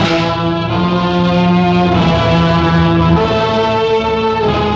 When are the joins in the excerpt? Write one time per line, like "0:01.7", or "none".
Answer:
none